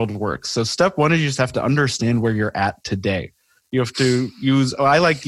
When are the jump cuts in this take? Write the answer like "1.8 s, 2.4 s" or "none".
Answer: none